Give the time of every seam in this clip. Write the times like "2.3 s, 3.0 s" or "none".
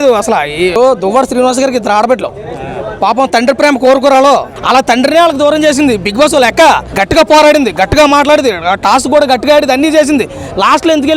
0.8 s, 4.5 s, 6.9 s